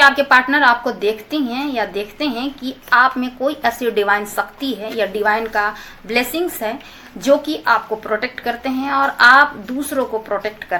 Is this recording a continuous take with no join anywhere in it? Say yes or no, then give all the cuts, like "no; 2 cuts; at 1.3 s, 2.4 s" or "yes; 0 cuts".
yes; 0 cuts